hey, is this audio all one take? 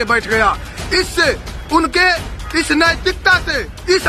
yes; 0 cuts

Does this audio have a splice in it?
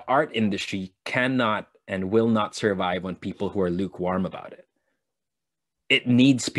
no; 0 cuts

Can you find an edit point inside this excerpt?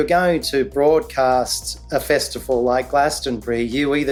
no; 0 cuts

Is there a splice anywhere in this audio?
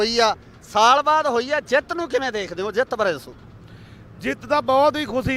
yes; 2 cuts; at 1.0 s, 2.7 s

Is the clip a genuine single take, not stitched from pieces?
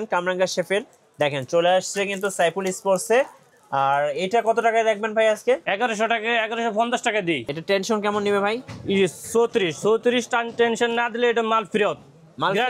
no; 2 cuts; at 5.7 s, 7.5 s

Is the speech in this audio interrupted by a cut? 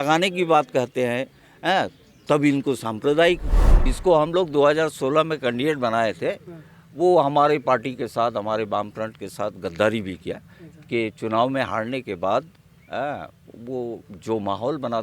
yes; 1 cut; at 3.8 s

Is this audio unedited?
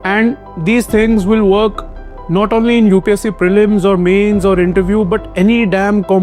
yes; 0 cuts

